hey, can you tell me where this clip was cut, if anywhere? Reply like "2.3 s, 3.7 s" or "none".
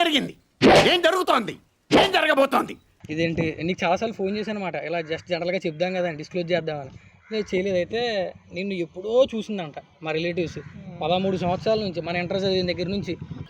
none